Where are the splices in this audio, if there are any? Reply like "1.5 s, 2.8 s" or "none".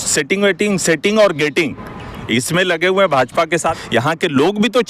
3.8 s